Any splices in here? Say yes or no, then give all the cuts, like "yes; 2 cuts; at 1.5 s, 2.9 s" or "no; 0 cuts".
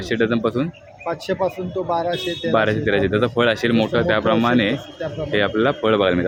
no; 0 cuts